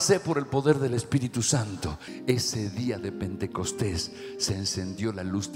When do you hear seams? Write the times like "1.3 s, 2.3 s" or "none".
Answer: 2.1 s